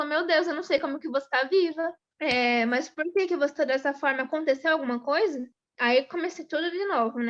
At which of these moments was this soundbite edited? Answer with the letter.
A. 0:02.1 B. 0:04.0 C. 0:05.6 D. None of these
D